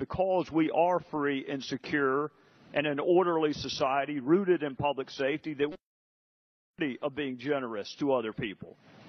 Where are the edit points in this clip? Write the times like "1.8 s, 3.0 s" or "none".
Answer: none